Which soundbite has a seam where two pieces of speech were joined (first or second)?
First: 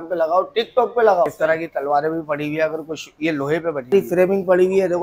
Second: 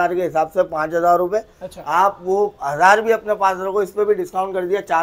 first